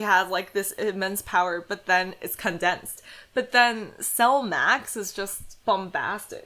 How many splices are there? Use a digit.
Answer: 1